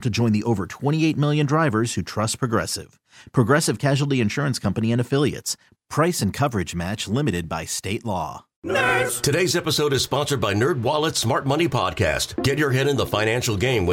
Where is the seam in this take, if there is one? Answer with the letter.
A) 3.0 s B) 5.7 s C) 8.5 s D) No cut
C